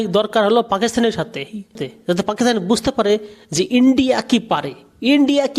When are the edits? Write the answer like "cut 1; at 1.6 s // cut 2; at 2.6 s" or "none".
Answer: cut 1; at 1.9 s